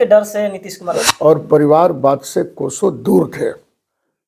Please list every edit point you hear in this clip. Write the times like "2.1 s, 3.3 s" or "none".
1.0 s